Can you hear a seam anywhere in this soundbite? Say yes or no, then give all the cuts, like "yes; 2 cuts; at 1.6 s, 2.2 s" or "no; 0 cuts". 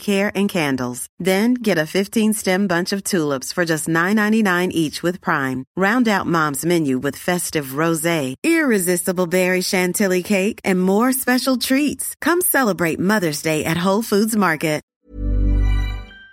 yes; 1 cut; at 14.9 s